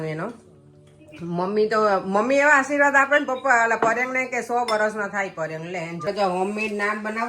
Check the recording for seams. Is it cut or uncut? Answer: cut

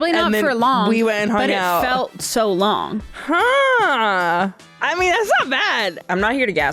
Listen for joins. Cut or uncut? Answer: cut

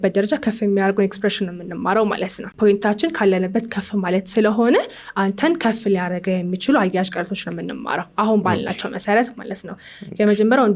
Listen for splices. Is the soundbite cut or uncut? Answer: cut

